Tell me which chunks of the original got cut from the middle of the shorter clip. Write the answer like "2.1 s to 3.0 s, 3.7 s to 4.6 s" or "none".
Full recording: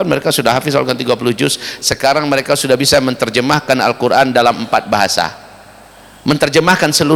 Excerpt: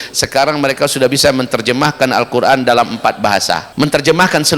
5.3 s to 6.1 s

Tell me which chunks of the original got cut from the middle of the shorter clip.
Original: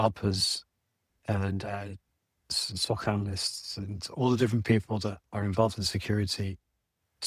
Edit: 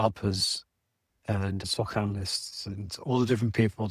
1.6 s to 2.7 s

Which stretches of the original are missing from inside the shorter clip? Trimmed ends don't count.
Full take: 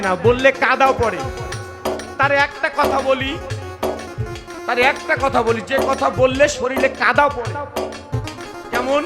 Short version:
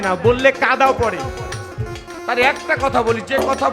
1.7 s to 4.1 s

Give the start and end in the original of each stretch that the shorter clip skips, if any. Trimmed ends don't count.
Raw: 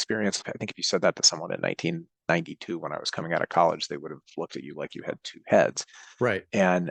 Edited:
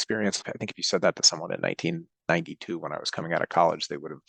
none

